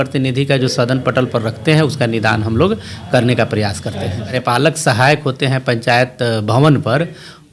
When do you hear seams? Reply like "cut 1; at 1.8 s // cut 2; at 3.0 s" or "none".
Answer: cut 1; at 4.4 s